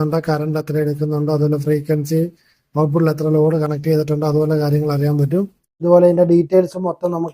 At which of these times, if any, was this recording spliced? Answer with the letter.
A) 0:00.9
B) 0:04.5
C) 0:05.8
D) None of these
C